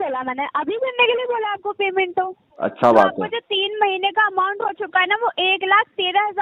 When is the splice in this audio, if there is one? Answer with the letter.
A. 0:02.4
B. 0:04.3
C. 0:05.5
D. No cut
A